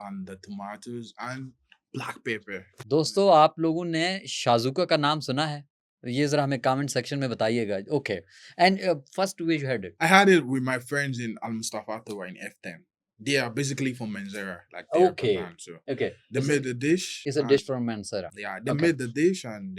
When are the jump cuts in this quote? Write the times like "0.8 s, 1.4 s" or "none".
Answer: none